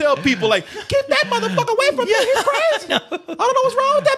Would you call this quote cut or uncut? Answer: uncut